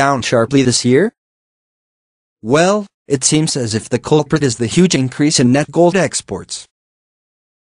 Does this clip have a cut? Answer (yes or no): no